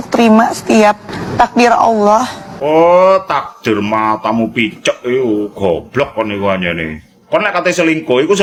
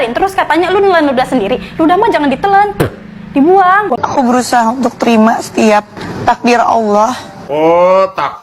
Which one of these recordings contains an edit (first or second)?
second